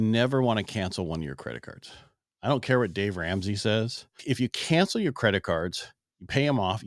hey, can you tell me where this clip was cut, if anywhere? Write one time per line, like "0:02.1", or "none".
0:04.1